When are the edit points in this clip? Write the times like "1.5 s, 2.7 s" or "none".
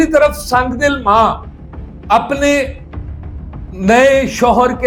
none